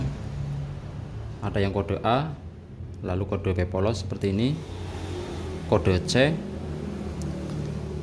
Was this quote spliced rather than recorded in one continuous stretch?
no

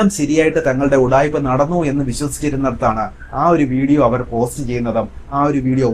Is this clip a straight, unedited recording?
yes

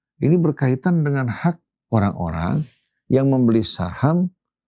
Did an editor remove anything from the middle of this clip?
yes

